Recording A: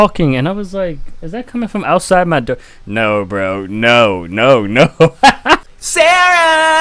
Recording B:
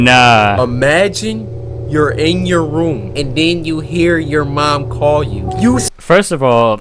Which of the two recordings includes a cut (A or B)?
A